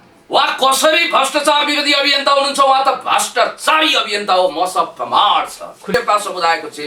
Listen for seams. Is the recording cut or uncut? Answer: cut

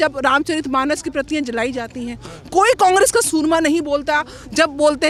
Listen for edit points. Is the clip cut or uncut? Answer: uncut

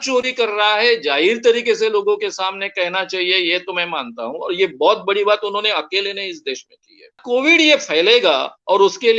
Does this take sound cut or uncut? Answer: cut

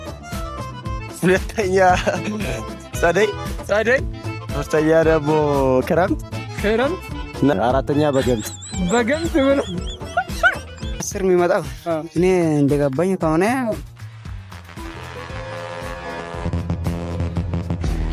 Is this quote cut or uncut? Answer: uncut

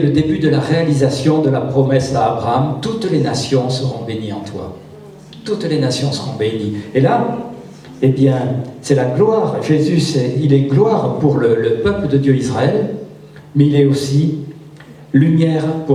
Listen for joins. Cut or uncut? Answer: uncut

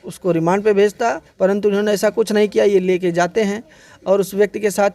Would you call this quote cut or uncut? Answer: cut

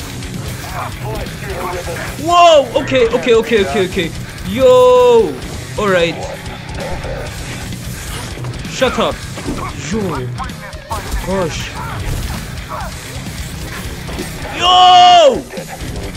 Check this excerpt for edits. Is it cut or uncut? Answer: uncut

